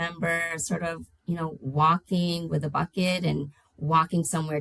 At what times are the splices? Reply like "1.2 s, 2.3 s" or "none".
none